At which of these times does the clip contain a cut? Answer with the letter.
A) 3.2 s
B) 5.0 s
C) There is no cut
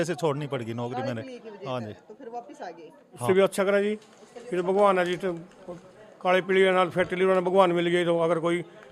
A